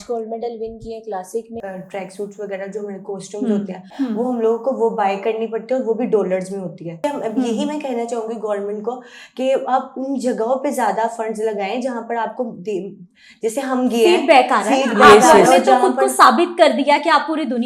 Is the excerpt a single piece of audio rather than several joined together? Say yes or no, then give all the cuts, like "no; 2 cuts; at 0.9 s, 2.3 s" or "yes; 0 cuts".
no; 3 cuts; at 1.5 s, 3.9 s, 7.0 s